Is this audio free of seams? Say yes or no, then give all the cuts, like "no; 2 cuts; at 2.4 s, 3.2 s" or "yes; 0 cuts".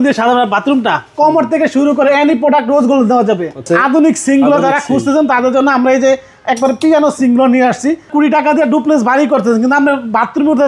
no; 2 cuts; at 3.7 s, 8.1 s